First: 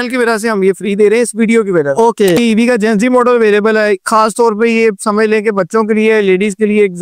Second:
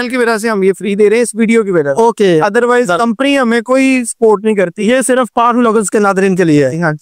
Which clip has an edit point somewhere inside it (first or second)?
first